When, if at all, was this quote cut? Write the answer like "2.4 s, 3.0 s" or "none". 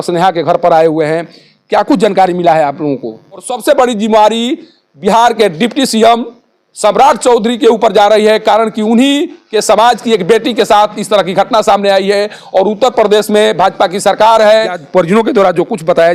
3.5 s, 14.8 s